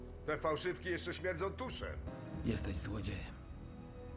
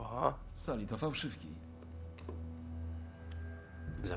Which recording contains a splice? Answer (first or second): first